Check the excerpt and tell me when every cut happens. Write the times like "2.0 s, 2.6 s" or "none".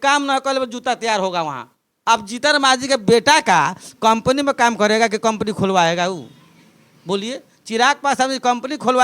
1.9 s